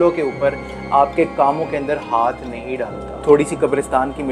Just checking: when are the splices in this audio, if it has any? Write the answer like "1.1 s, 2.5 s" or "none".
3.2 s

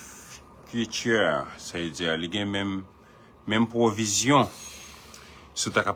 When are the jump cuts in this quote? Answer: none

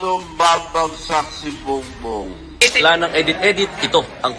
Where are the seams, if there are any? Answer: 2.8 s

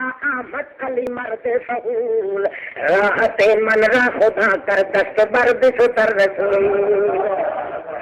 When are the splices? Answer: 1.0 s

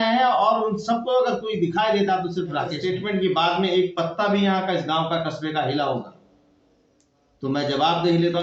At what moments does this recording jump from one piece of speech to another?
2.8 s

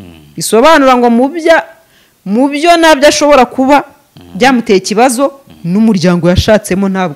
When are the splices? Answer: none

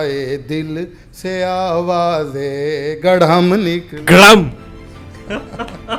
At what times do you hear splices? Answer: none

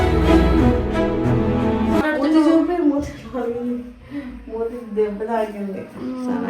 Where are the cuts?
2.1 s

